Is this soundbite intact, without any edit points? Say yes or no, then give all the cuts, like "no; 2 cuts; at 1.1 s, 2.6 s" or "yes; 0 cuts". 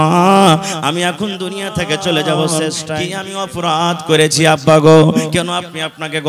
no; 1 cut; at 2.9 s